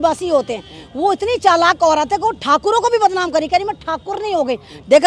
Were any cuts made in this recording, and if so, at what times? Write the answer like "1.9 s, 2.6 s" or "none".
none